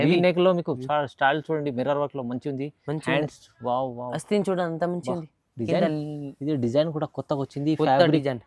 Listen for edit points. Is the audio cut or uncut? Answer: uncut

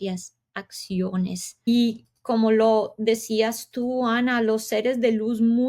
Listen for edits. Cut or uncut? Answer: cut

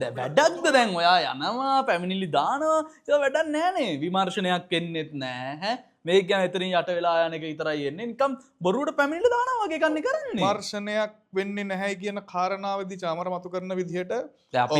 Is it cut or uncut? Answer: uncut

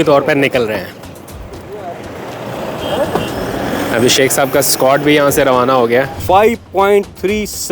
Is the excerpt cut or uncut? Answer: cut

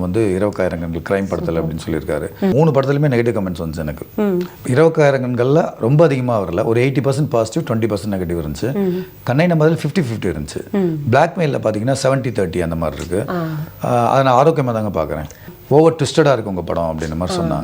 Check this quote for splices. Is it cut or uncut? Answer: cut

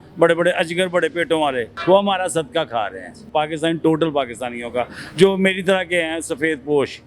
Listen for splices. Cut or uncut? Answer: cut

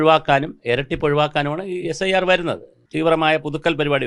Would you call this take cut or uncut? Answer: cut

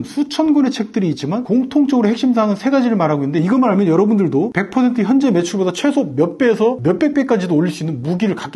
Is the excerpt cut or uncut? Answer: cut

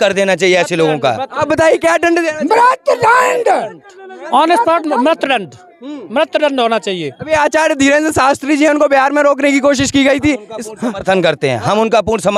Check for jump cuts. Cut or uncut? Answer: uncut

